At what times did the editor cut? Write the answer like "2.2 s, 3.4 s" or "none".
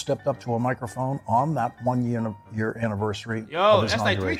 none